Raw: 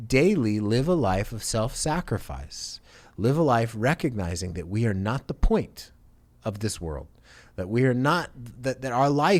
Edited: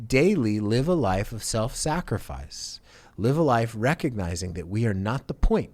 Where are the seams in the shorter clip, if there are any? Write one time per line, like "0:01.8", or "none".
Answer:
none